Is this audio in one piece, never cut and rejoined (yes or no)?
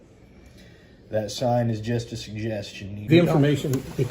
no